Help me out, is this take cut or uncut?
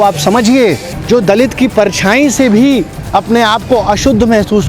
cut